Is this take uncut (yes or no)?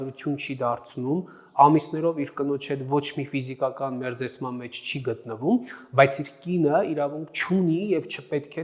yes